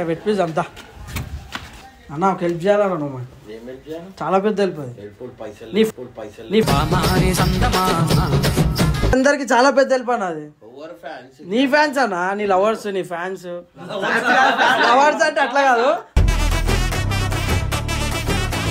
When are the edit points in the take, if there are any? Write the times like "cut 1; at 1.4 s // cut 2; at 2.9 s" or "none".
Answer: cut 1; at 1.7 s // cut 2; at 9.1 s